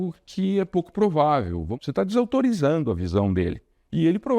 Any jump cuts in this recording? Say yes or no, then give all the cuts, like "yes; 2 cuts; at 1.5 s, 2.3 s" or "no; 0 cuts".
yes; 1 cut; at 1.8 s